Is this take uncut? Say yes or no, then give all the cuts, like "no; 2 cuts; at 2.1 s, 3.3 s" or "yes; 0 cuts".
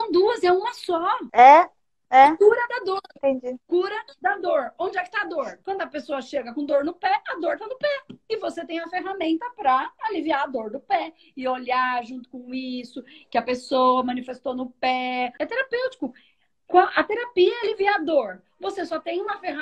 no; 3 cuts; at 1.2 s, 5.6 s, 15.3 s